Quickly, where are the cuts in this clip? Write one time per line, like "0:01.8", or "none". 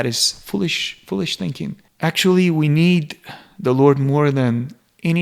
0:01.8